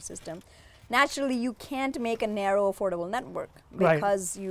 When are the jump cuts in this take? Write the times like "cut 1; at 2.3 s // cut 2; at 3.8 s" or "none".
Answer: none